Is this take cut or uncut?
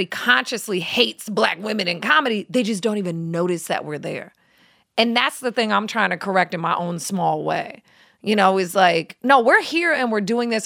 uncut